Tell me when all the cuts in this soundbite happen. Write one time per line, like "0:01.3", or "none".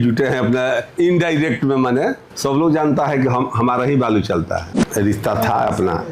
0:02.3
0:04.7